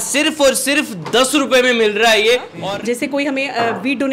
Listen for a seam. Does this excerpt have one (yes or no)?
yes